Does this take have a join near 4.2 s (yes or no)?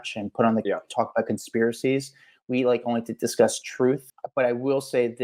yes